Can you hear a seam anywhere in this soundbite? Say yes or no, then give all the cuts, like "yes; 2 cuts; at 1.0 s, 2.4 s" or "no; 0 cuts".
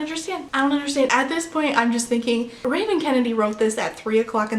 yes; 1 cut; at 1.1 s